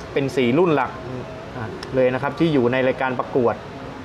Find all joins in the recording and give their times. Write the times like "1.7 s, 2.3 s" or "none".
none